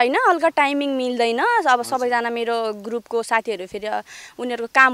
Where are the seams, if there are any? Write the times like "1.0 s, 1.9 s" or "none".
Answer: none